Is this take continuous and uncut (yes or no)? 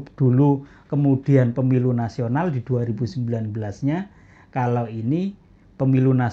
yes